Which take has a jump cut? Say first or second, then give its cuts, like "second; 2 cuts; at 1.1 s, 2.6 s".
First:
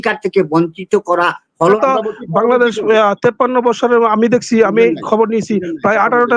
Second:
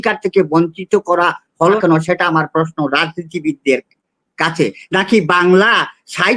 first; 1 cut; at 1.8 s